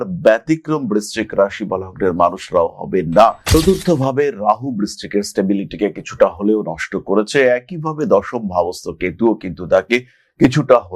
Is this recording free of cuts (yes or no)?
no